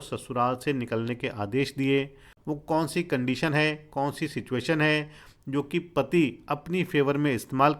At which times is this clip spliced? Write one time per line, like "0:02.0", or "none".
0:02.3